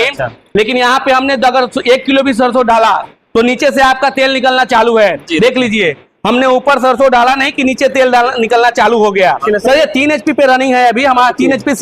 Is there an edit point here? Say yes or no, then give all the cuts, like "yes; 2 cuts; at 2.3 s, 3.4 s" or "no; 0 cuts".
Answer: yes; 1 cut; at 9.4 s